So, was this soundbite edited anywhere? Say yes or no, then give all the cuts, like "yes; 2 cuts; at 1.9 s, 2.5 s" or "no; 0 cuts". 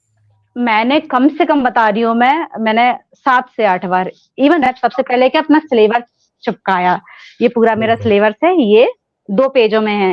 yes; 1 cut; at 4.6 s